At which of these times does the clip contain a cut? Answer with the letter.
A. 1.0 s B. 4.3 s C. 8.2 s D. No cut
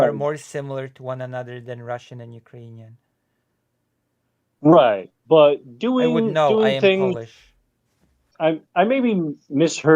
C